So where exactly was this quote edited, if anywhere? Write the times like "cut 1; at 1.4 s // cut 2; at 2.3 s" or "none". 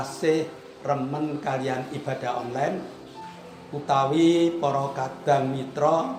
none